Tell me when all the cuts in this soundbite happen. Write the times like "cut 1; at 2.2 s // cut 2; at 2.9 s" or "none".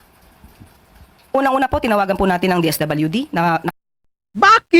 cut 1; at 3.7 s